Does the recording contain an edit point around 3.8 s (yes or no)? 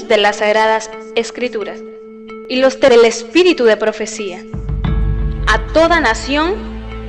no